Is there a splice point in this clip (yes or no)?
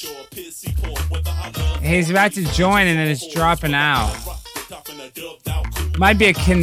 no